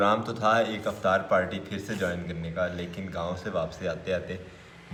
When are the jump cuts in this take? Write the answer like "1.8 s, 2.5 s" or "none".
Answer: none